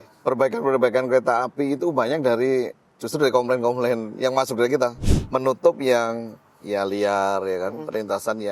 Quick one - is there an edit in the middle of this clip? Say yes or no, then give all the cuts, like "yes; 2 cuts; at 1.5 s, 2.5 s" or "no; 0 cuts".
yes; 1 cut; at 5.1 s